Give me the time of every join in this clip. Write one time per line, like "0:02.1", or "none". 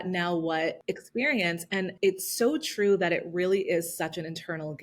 0:00.8
0:01.9